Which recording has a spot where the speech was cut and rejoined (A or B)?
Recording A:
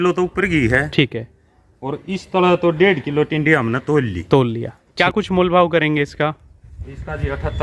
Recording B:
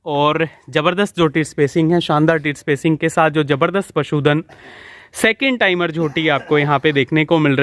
A